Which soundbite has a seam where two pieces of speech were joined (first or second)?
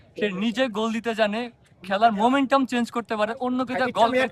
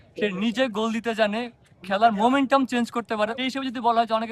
second